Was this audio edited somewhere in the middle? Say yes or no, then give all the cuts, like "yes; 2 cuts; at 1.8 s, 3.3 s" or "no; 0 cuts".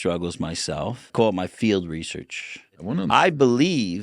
yes; 2 cuts; at 1.0 s, 2.8 s